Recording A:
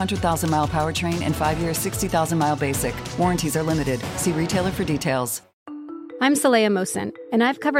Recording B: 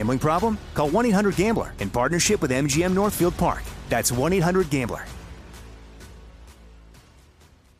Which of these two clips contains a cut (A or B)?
A